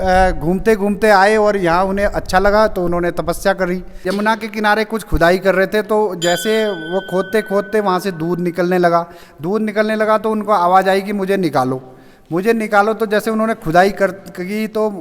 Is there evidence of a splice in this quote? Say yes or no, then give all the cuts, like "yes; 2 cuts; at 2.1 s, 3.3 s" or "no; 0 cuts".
yes; 1 cut; at 4.0 s